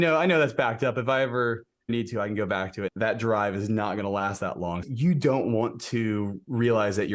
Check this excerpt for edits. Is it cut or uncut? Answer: cut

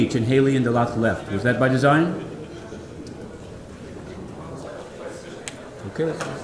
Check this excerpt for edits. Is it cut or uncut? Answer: uncut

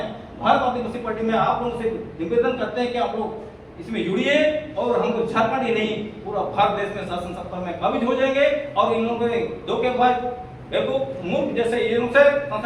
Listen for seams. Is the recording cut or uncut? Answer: uncut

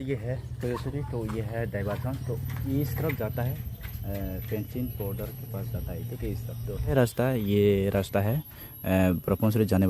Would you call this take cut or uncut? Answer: cut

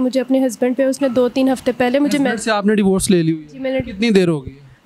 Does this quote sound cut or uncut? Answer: uncut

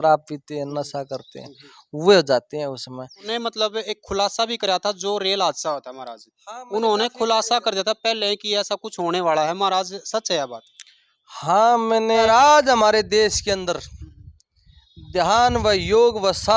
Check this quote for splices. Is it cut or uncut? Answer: cut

